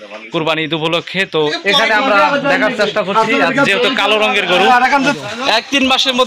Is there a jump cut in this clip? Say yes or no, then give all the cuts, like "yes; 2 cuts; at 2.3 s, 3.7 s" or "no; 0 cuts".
yes; 2 cuts; at 1.6 s, 5.1 s